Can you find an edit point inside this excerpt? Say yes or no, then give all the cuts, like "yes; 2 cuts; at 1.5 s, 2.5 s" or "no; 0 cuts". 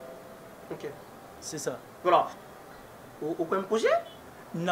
yes; 1 cut; at 2.3 s